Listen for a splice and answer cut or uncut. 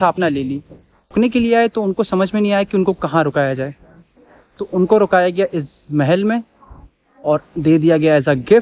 cut